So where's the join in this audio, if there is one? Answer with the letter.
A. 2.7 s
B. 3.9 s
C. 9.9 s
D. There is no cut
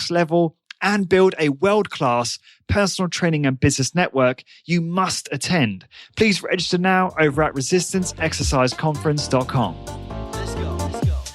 C